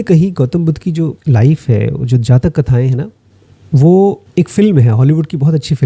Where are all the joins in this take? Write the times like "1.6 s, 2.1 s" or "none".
none